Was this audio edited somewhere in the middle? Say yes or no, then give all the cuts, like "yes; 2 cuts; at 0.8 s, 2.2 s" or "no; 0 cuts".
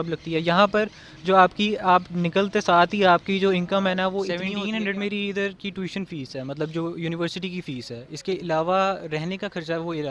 yes; 1 cut; at 4.4 s